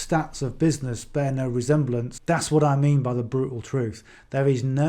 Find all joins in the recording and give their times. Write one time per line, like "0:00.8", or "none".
0:02.1

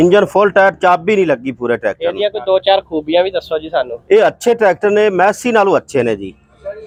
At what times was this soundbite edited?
none

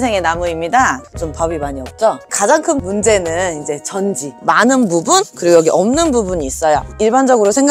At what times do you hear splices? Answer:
0:01.0
0:04.3

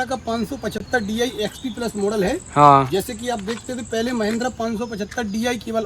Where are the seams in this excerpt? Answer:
none

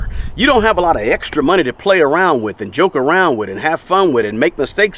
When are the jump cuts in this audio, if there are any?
none

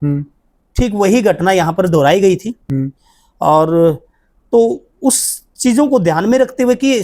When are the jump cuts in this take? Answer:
none

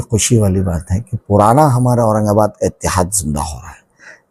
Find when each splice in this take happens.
none

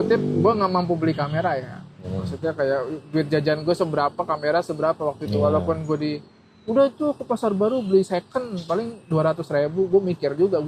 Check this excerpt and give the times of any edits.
none

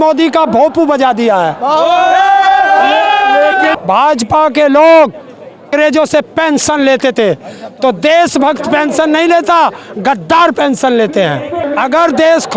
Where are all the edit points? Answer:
0:03.8
0:05.7
0:11.6

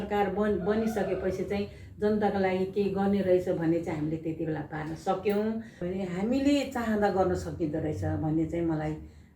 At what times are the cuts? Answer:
0:05.9

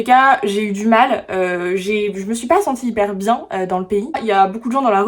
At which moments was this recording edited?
0:04.2

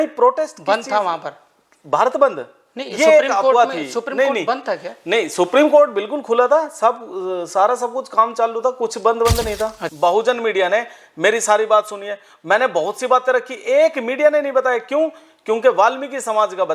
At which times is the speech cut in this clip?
0:09.8

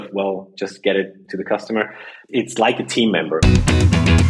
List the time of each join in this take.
0:02.2
0:03.4

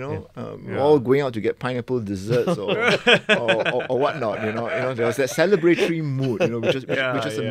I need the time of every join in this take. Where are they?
none

